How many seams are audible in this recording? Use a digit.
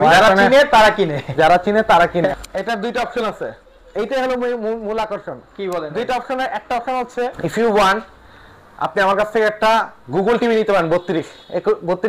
2